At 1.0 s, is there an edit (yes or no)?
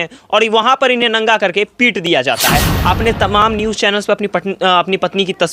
no